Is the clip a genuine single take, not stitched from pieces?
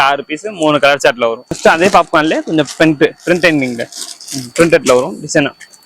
no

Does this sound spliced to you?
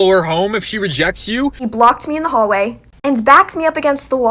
yes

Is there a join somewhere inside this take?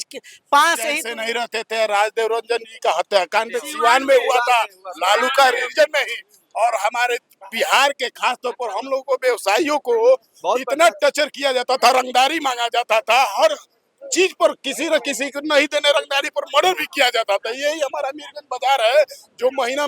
yes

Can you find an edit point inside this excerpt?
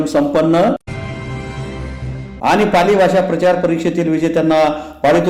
no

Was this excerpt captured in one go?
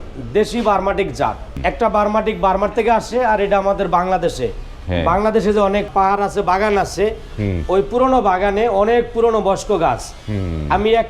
no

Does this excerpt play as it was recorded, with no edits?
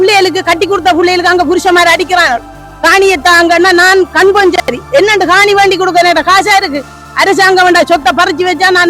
yes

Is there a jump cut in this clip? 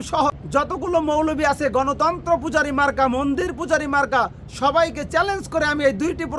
no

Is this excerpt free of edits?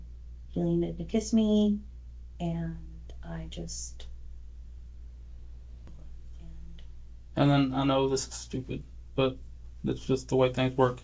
no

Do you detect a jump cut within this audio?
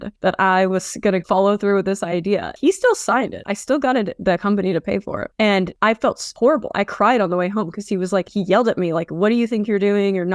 yes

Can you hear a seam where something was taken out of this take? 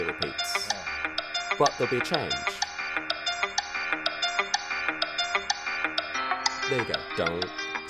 no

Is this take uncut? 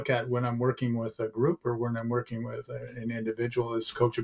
yes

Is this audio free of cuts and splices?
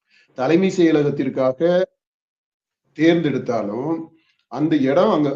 yes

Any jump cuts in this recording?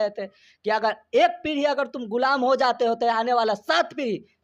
no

